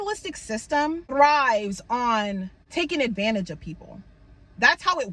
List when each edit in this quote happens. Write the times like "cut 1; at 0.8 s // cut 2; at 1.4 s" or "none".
cut 1; at 1.1 s // cut 2; at 2.6 s